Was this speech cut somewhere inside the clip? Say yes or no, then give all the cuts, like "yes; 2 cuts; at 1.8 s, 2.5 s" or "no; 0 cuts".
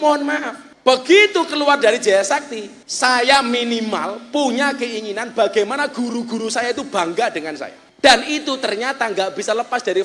no; 0 cuts